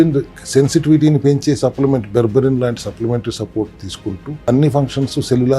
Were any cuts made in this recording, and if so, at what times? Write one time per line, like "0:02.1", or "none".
0:04.5